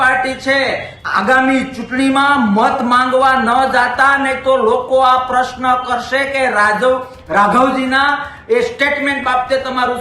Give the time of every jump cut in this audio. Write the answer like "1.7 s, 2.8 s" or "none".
0.9 s